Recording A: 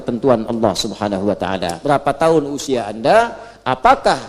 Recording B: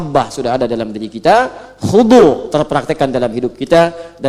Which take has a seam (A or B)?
A